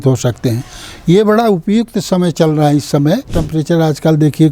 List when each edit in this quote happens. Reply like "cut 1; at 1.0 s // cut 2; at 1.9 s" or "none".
cut 1; at 3.4 s